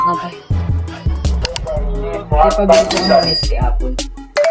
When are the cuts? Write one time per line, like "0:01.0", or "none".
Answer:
0:01.4